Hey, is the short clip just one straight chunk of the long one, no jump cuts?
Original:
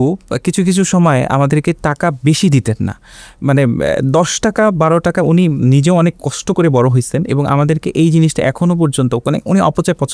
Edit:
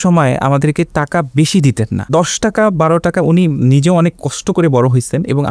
no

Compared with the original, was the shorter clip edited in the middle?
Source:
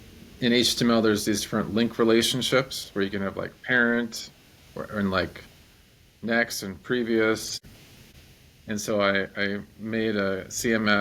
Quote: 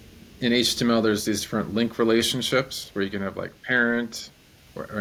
no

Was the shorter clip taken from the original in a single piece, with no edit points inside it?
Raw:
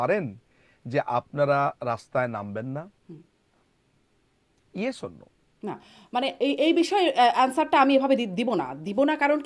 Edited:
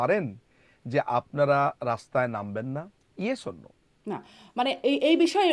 no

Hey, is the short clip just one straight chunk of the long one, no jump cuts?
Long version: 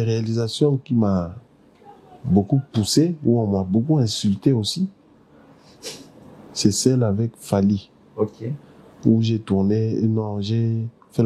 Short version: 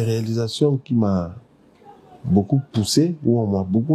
yes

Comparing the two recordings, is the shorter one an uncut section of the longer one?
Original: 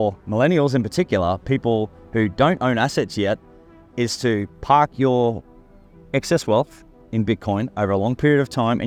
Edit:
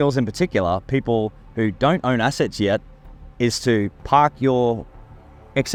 yes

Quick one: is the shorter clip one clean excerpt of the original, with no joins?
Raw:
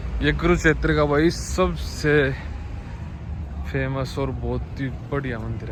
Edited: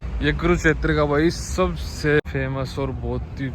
no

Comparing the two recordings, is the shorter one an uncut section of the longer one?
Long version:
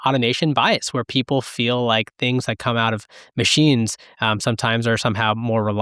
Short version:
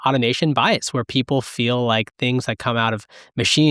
yes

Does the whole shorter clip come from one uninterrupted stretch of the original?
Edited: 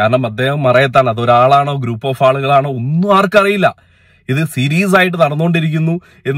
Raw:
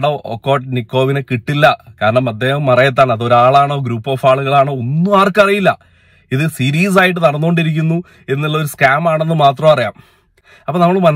yes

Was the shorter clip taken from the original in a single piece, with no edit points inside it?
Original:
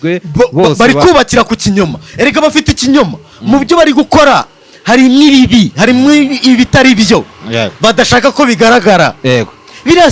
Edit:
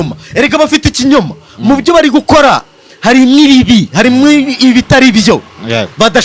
yes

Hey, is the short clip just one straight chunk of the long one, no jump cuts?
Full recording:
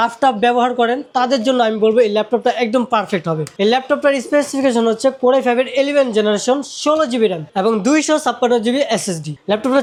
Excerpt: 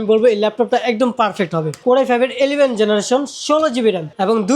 no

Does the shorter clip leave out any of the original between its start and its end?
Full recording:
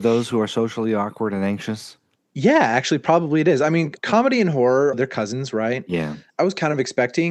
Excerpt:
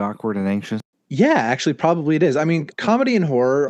yes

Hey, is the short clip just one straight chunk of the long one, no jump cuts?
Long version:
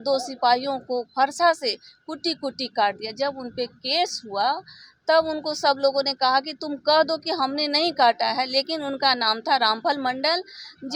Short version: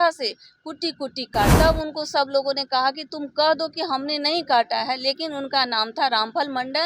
no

